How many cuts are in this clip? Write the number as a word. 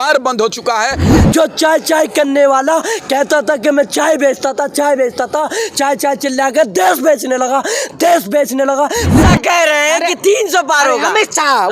two